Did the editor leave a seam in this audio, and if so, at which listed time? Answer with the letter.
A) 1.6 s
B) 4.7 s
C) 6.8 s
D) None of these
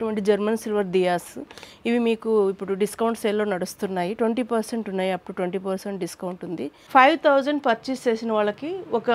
C